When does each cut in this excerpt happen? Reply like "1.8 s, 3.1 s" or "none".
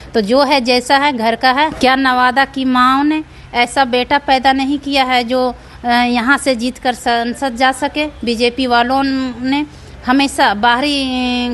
none